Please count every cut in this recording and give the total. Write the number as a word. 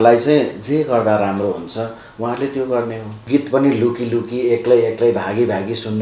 one